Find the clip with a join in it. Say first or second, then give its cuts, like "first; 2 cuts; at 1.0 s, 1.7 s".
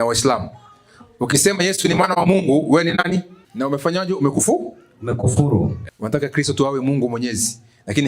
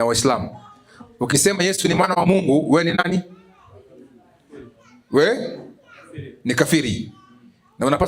first; 2 cuts; at 3.4 s, 5.8 s